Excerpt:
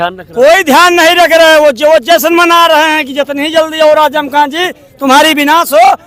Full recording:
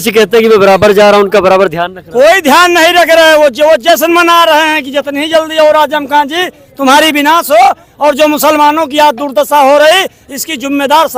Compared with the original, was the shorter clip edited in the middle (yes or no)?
no